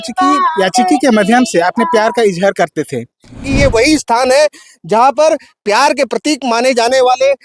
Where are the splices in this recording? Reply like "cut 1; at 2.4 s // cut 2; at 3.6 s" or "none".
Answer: cut 1; at 3.4 s